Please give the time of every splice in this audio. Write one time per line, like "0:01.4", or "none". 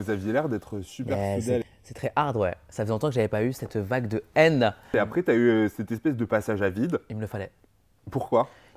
0:01.6
0:04.9